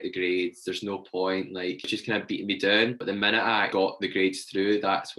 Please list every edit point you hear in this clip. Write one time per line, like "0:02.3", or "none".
0:01.8
0:03.7